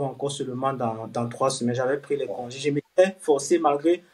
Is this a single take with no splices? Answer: yes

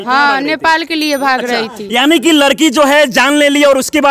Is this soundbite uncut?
yes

